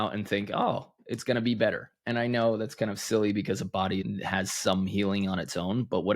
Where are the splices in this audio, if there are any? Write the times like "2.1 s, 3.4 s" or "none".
4.0 s